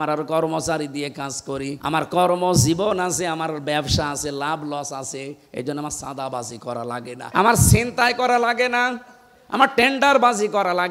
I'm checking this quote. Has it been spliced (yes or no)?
yes